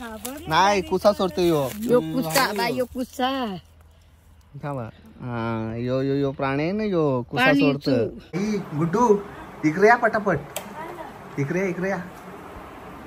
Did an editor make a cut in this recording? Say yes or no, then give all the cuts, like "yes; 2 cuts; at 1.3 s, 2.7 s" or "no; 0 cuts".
yes; 1 cut; at 8.2 s